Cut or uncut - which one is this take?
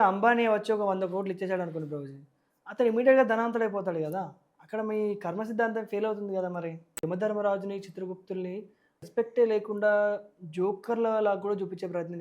cut